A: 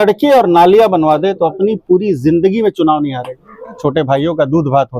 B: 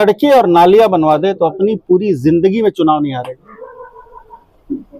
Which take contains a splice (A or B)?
A